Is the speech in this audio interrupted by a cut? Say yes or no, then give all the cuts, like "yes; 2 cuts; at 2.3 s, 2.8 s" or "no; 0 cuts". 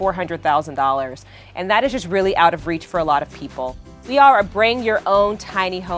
yes; 1 cut; at 4.1 s